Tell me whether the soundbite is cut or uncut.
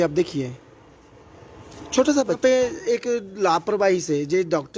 cut